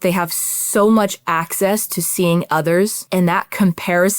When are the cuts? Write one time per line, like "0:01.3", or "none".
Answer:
0:03.0